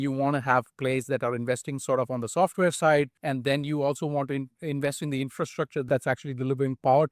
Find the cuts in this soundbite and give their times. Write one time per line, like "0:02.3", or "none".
0:03.2
0:05.9

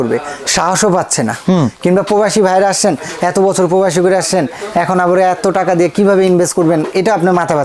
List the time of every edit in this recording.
none

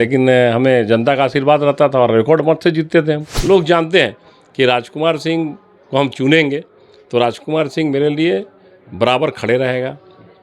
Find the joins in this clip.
0:03.3

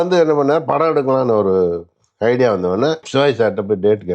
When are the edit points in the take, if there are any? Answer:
0:03.0

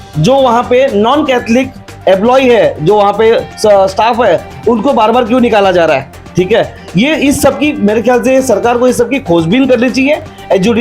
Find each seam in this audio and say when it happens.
none

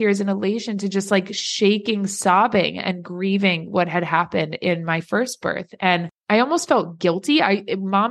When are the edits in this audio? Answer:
0:06.1

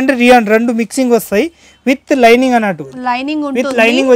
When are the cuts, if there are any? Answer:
none

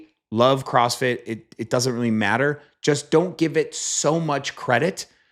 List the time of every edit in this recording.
none

